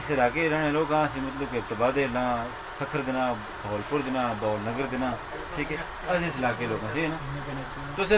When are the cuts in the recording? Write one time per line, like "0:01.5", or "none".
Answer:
0:07.3